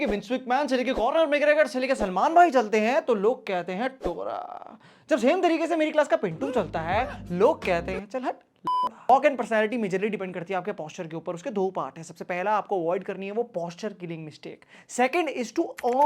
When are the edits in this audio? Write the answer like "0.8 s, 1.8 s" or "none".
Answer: none